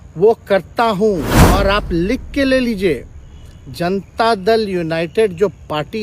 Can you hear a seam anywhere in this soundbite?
yes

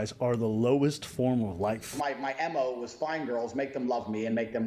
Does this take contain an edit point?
yes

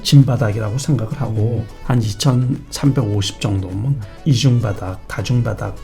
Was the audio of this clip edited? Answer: yes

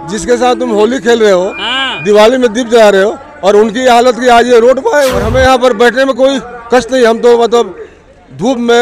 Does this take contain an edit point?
yes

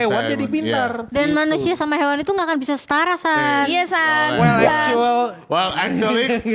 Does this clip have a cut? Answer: yes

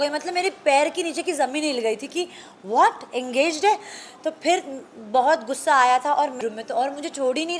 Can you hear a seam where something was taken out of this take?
yes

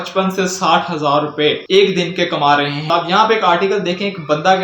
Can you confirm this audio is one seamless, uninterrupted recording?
no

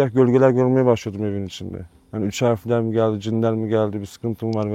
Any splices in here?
no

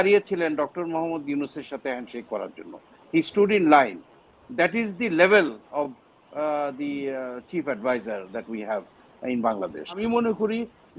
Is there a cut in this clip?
yes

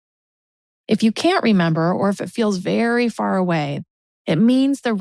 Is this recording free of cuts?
no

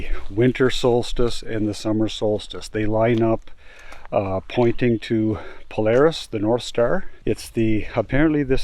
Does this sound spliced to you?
yes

